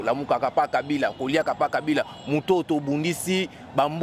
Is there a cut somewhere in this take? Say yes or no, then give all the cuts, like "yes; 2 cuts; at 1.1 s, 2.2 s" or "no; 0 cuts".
no; 0 cuts